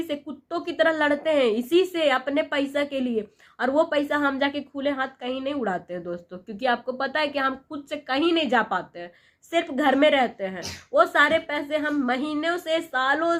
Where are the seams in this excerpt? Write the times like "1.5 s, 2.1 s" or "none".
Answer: none